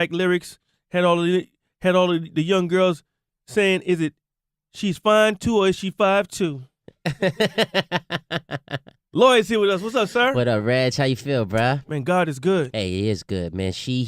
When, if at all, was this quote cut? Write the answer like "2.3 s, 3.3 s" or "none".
9.5 s